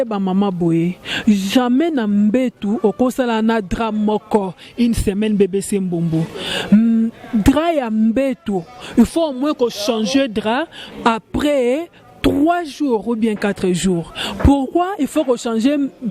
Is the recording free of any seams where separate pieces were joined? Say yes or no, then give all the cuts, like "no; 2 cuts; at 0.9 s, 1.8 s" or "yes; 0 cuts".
yes; 0 cuts